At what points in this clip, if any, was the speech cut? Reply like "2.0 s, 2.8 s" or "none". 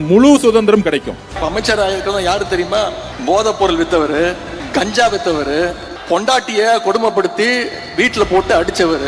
1.4 s, 3.1 s, 4.5 s, 5.9 s